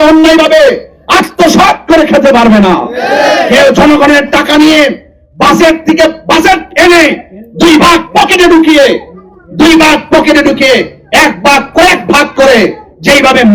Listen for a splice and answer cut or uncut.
uncut